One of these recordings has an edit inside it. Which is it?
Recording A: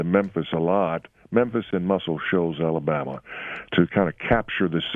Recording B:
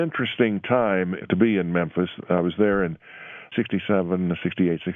B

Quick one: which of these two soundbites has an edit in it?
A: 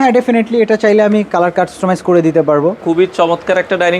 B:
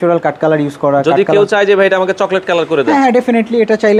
A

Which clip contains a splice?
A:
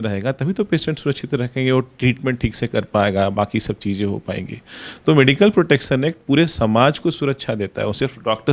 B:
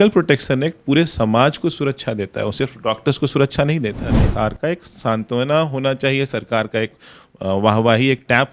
B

